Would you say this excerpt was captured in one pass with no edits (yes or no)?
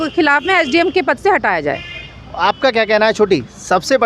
yes